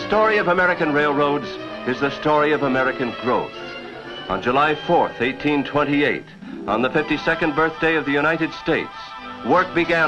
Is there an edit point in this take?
yes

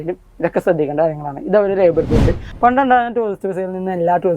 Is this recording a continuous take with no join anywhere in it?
no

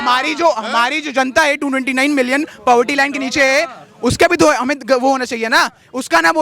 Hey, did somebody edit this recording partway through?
no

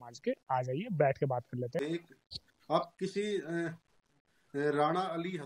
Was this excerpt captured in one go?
no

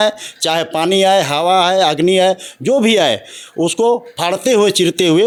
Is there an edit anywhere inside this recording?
no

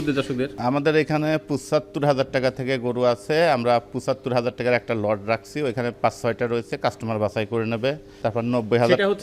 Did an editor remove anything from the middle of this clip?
no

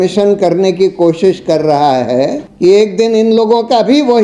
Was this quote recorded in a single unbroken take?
no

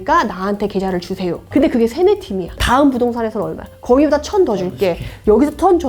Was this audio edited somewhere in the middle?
yes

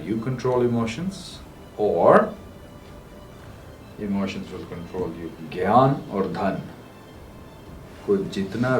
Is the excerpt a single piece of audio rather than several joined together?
no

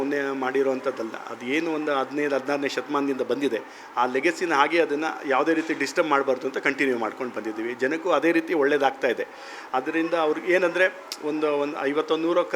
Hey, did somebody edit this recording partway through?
no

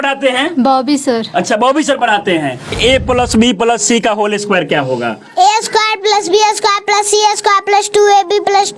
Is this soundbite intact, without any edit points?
no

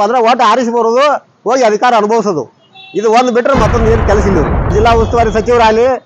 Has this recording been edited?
yes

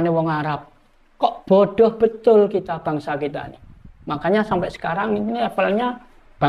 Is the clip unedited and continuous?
yes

